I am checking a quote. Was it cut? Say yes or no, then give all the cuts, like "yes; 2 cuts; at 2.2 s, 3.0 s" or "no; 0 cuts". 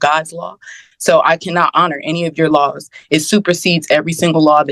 no; 0 cuts